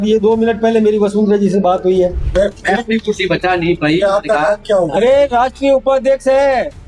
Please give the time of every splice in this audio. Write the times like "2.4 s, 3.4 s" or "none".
2.2 s